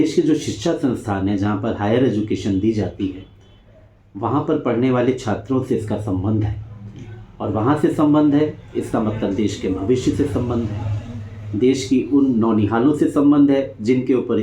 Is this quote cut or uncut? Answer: uncut